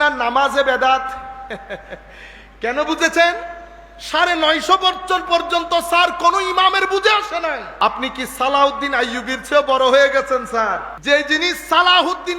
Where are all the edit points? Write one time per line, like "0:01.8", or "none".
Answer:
0:07.7
0:10.9